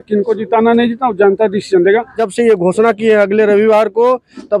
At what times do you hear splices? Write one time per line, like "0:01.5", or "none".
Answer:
0:02.2